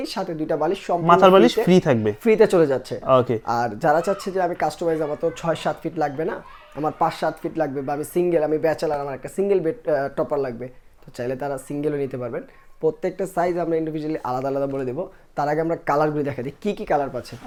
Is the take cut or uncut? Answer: uncut